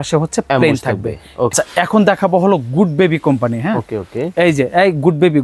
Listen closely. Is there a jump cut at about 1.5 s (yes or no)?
yes